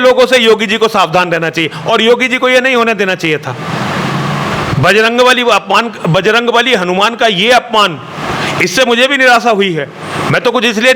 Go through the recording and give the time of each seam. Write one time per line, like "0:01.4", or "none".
none